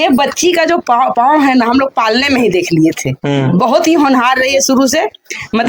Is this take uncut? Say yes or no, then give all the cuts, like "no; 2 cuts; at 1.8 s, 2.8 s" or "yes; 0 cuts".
yes; 0 cuts